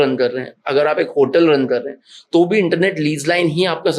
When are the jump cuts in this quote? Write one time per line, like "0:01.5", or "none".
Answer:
none